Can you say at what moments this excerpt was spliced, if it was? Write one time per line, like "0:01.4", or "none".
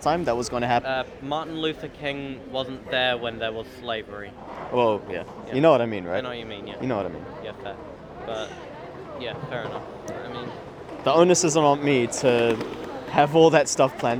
none